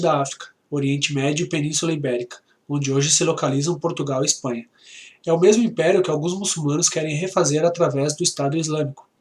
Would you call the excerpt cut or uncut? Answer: cut